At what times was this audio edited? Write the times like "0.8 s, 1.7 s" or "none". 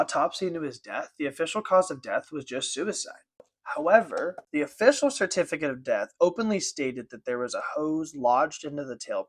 3.5 s, 4.4 s